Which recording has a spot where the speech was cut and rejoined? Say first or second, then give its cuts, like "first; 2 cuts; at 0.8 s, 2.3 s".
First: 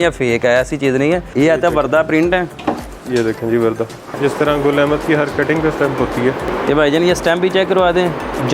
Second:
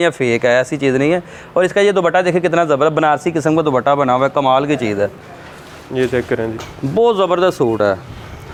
first; 4 cuts; at 1.3 s, 2.9 s, 4.2 s, 6.5 s